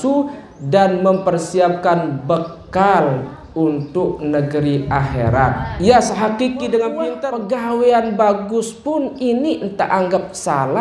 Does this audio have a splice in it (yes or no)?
yes